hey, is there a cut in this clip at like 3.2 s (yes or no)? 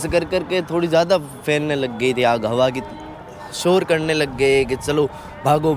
yes